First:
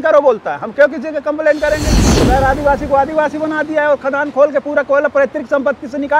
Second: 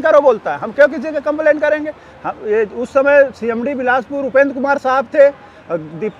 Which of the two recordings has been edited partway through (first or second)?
first